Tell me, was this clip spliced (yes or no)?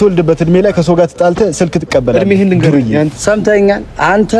yes